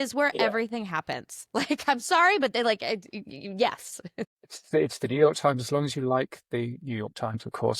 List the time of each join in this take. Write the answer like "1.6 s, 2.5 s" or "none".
none